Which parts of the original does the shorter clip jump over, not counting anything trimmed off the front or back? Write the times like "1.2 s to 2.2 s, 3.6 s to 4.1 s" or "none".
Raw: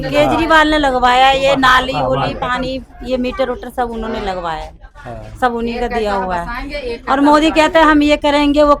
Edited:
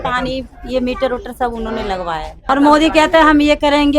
4.8 s to 7.0 s